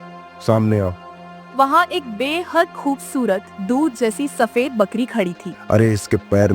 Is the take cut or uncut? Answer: cut